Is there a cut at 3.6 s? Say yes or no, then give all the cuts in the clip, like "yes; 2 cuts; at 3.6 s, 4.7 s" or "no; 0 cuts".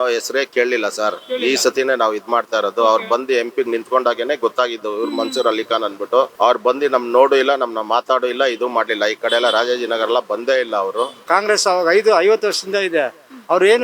no; 2 cuts; at 6.3 s, 11.2 s